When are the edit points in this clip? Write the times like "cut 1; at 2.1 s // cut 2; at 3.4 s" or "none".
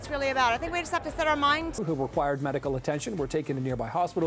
cut 1; at 1.8 s